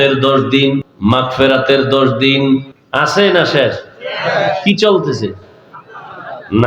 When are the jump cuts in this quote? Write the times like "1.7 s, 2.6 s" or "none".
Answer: 0.9 s, 2.8 s